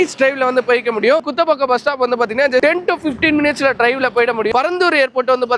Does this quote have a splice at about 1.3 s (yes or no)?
yes